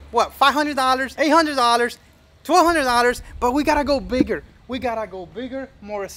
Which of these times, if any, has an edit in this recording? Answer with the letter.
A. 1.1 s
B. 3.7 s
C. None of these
A